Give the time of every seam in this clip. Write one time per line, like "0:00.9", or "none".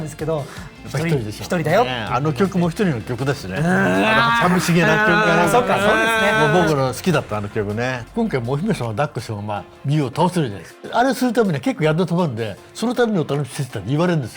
0:08.0
0:10.8